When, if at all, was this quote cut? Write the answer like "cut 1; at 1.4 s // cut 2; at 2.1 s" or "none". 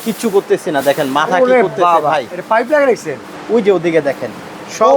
cut 1; at 3.3 s